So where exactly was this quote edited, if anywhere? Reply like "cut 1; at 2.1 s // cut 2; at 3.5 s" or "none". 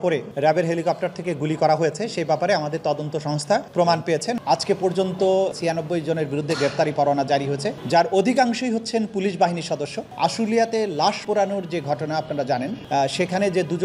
cut 1; at 4.4 s // cut 2; at 10.1 s